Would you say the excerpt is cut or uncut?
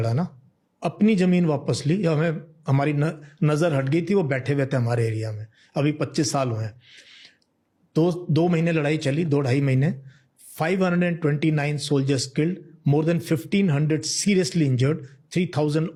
uncut